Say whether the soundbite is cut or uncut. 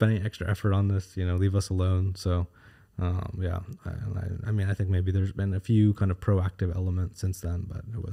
uncut